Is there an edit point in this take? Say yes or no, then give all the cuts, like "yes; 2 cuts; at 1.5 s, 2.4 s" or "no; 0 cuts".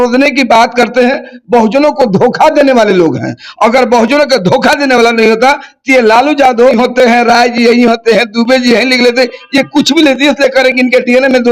yes; 1 cut; at 6.7 s